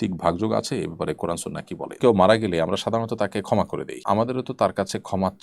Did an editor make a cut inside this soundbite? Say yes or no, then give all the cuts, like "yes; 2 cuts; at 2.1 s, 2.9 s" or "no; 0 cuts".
yes; 2 cuts; at 1.9 s, 3.9 s